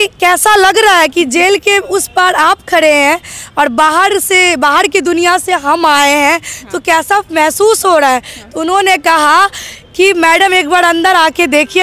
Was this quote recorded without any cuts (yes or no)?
yes